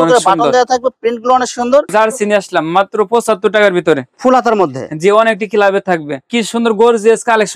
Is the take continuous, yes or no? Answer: no